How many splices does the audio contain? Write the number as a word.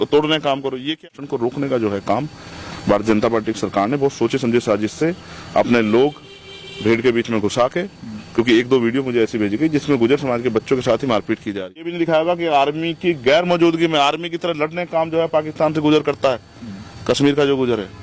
two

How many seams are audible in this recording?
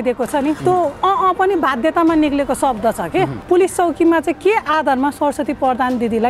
one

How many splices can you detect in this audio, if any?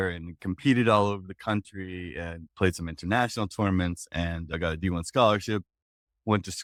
zero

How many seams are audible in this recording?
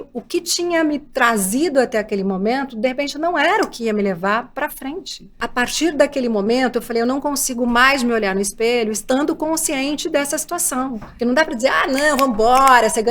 one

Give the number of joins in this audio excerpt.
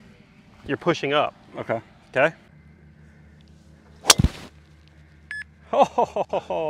one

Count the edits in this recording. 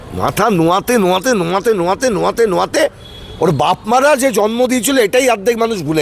zero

